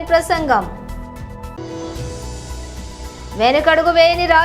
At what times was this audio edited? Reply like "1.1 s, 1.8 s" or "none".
none